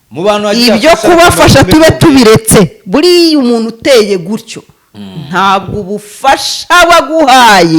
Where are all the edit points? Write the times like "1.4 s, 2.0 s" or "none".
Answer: none